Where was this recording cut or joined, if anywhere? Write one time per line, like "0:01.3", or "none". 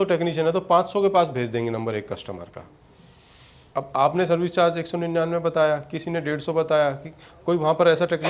none